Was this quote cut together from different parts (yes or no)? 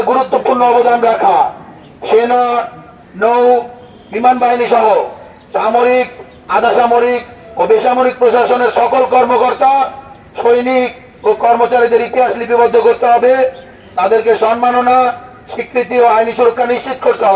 no